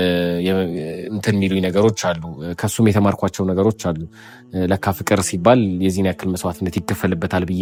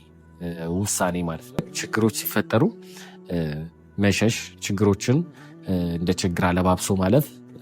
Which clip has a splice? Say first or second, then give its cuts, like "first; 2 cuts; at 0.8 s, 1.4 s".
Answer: second; 1 cut; at 1.8 s